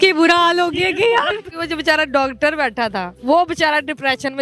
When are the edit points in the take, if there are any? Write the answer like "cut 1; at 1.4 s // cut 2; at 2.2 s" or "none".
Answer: cut 1; at 1.5 s // cut 2; at 3.1 s